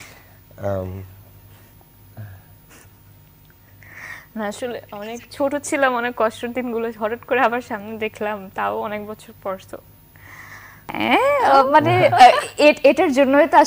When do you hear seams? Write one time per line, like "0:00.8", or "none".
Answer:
0:10.9